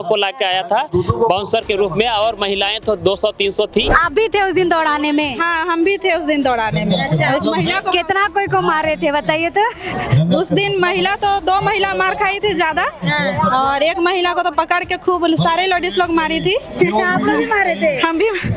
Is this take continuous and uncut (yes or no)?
no